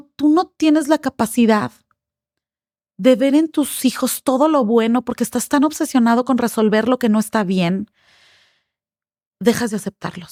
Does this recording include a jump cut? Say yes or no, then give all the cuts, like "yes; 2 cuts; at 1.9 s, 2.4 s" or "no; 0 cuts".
no; 0 cuts